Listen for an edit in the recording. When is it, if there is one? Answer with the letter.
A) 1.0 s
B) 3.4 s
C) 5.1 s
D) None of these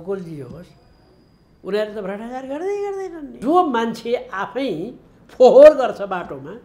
B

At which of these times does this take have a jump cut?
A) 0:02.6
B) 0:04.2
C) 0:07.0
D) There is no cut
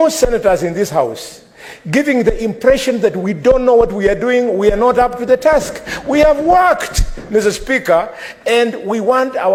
D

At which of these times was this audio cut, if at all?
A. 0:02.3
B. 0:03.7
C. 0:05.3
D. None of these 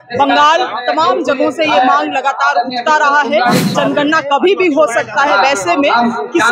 B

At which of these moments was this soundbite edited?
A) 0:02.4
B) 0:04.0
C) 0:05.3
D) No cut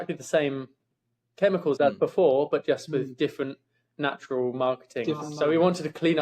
C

